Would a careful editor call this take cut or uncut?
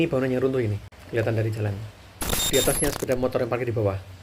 cut